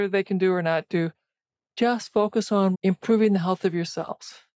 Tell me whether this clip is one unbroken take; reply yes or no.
no